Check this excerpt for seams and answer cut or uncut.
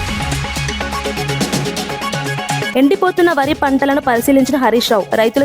cut